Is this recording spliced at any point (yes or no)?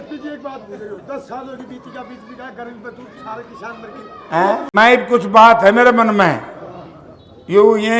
yes